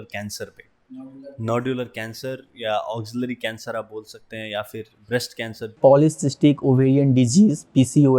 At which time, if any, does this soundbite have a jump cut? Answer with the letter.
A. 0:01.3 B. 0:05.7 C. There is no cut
B